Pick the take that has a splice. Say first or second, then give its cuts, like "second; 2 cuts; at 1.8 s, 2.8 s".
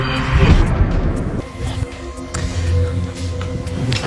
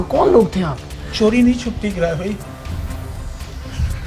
first; 1 cut; at 1.4 s